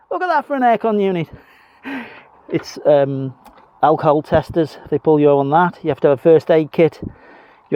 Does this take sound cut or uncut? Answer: cut